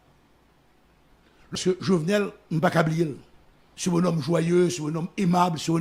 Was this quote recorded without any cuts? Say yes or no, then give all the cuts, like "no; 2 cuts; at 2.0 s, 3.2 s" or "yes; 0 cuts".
no; 1 cut; at 1.5 s